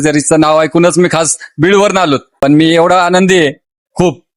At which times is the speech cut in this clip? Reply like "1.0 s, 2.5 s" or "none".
2.3 s

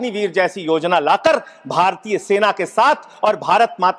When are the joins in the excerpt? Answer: none

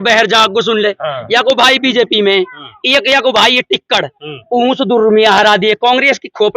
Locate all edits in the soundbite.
none

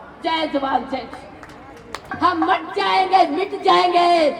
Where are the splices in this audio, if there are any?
2.0 s

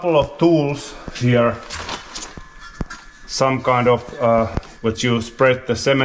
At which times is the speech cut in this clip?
4.6 s

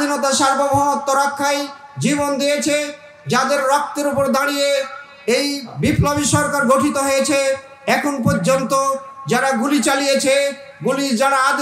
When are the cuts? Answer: 5.7 s

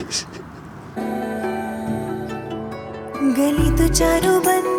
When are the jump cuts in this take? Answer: none

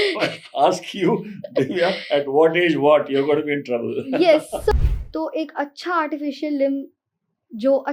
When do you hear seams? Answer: 4.7 s

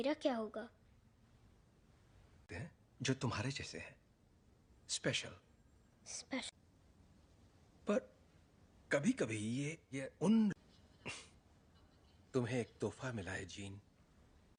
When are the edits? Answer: none

